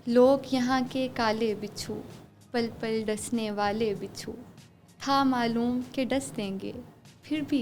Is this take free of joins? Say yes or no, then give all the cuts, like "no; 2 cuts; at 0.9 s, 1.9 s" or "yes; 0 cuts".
yes; 0 cuts